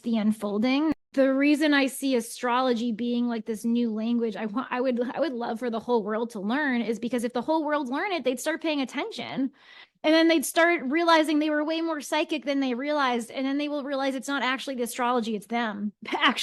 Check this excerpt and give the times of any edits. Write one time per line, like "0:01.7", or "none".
0:00.9

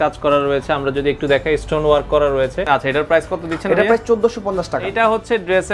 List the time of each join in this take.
0:02.6
0:04.9

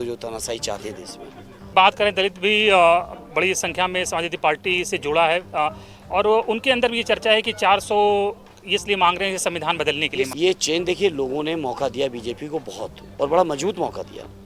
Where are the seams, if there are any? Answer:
0:01.7
0:10.3

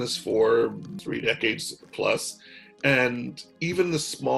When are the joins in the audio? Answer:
0:01.0

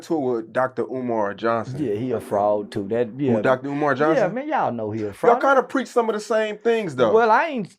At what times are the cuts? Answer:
none

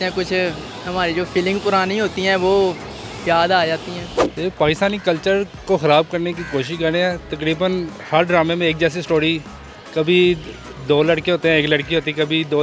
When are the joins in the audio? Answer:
none

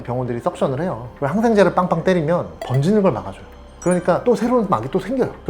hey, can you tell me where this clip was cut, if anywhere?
0:01.0
0:02.5

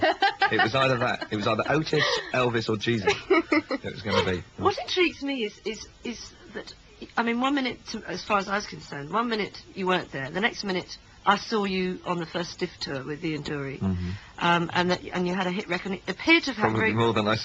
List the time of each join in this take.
0:12.5

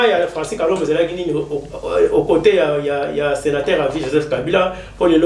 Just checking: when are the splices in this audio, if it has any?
none

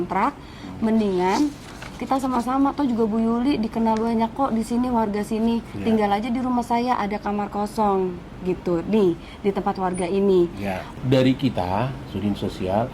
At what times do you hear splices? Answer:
0:10.9

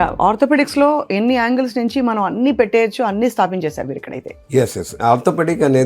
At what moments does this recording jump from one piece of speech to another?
none

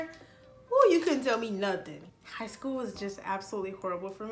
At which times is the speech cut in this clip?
0:02.0

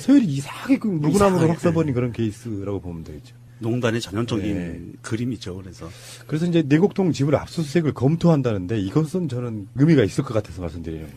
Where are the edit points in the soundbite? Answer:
0:01.4

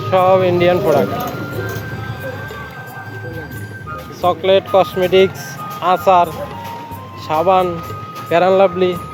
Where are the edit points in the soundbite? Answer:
none

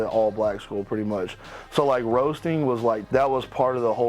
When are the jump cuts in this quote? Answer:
0:03.0

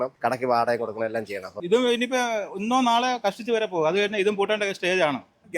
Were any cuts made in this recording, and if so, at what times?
0:01.6

